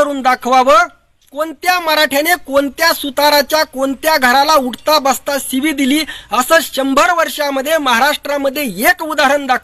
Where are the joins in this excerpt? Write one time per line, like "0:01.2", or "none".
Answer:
0:01.2